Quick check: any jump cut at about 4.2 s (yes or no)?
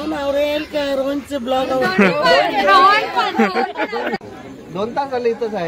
yes